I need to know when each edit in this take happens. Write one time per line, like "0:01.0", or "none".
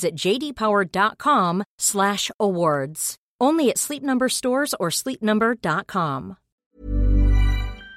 0:06.5